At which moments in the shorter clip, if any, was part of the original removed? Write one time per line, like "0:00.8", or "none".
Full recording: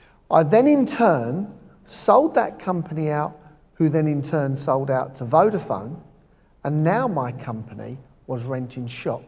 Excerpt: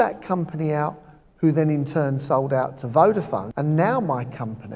0:03.5